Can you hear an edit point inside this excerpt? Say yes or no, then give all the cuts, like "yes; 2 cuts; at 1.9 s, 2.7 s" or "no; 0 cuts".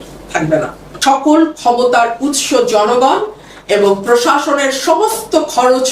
yes; 1 cut; at 1.0 s